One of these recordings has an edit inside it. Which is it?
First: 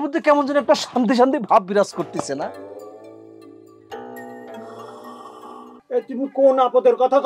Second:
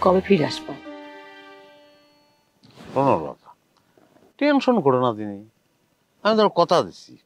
first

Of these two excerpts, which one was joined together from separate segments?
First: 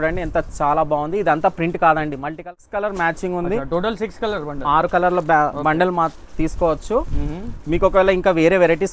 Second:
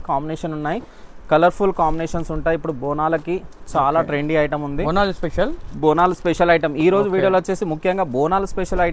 first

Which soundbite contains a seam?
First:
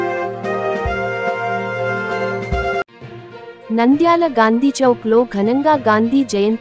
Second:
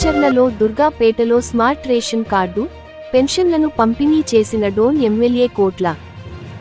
first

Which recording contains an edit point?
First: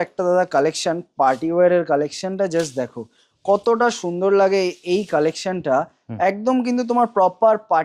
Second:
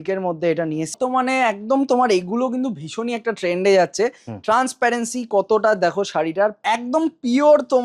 second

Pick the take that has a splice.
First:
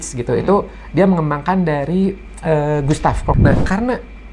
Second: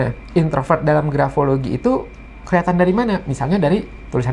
first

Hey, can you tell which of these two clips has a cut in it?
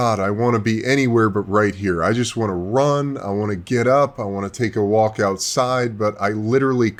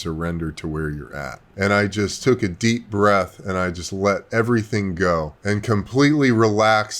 second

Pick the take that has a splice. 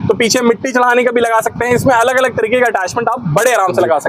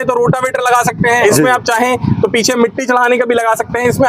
second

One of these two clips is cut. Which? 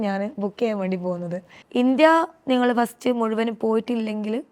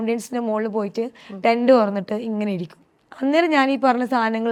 first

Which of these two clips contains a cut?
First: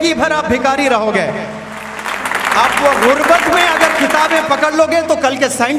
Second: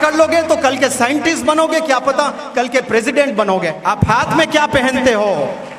second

